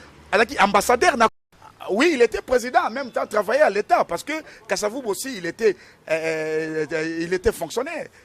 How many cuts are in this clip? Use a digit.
1